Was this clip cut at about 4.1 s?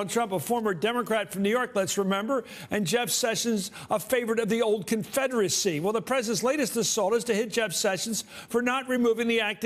yes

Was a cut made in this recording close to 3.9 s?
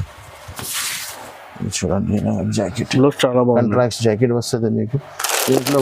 no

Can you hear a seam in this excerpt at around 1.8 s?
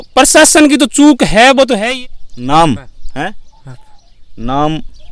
yes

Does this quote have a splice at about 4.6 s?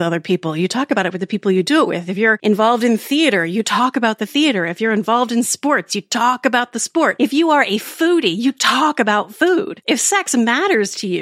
no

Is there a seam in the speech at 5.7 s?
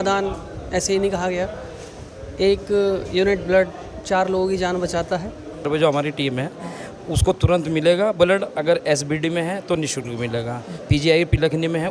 yes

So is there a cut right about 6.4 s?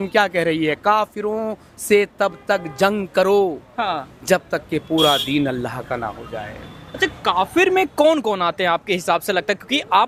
no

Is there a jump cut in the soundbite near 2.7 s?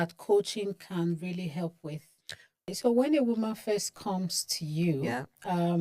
yes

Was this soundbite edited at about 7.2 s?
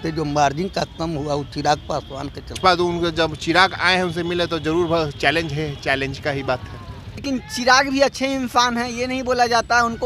yes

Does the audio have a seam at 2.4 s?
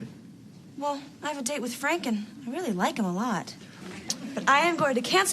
no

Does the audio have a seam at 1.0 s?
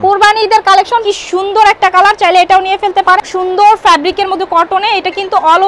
yes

